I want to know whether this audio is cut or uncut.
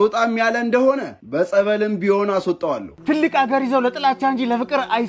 cut